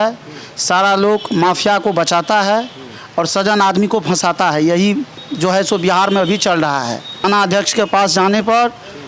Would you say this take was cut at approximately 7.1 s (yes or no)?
yes